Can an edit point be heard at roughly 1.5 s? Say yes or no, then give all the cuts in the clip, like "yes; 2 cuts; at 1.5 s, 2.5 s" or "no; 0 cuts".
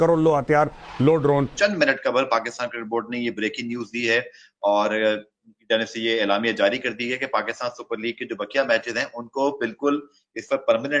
yes; 1 cut; at 1.5 s